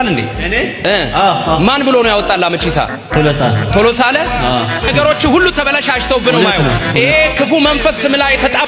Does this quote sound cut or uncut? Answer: uncut